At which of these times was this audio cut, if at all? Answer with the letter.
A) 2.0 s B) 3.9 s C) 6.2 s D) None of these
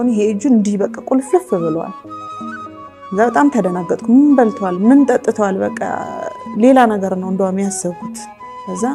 D